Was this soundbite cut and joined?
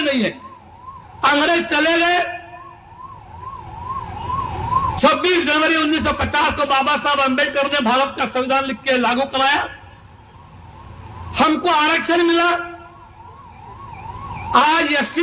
no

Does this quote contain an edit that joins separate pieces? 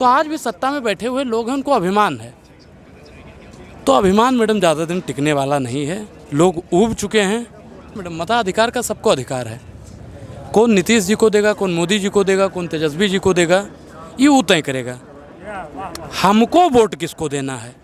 no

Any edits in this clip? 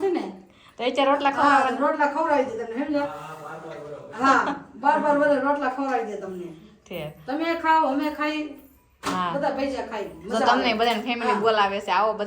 no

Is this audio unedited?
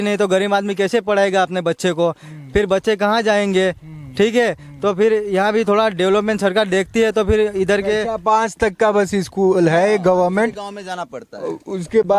yes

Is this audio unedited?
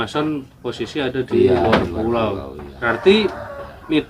no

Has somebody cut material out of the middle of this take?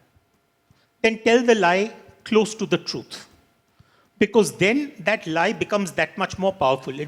no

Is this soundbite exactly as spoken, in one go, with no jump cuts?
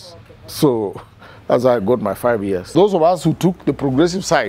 no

